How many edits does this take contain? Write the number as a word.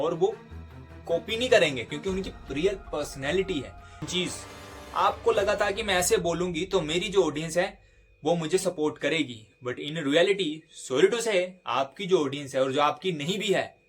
one